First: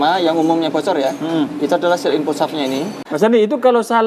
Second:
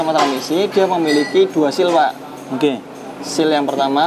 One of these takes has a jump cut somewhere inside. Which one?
first; 1 cut; at 3.0 s

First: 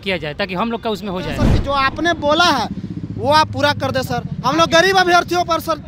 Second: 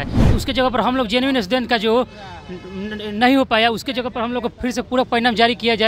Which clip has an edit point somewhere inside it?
first; 1 cut; at 1.5 s

